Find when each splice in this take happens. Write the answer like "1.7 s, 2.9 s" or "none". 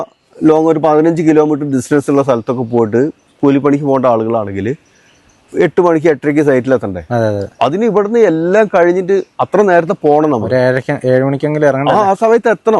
none